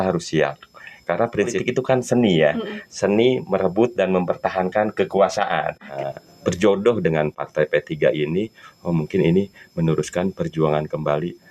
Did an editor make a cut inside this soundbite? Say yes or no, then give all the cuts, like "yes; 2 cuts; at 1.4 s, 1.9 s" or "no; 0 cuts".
yes; 2 cuts; at 1.6 s, 5.9 s